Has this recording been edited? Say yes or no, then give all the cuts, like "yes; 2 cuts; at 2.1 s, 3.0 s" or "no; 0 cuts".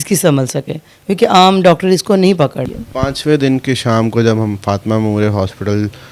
yes; 1 cut; at 2.7 s